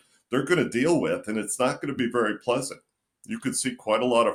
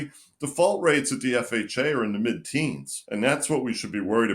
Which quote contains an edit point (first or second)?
second